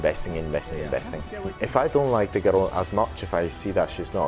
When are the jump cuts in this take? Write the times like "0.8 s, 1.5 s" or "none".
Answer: 1.5 s